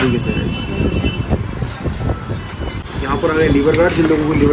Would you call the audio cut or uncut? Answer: uncut